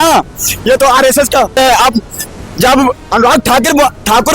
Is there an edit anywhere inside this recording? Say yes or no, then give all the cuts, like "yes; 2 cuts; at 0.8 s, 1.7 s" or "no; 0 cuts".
yes; 1 cut; at 1.6 s